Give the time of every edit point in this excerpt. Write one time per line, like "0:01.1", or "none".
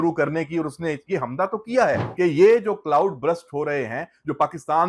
0:02.1